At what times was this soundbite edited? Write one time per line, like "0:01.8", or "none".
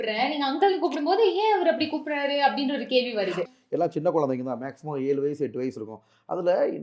0:03.5